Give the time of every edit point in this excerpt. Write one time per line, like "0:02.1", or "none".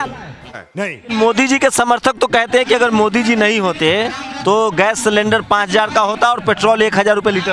0:01.0
0:04.3